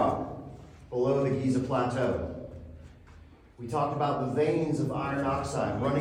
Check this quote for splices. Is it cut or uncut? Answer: uncut